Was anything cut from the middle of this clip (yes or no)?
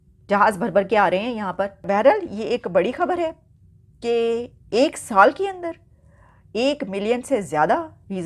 yes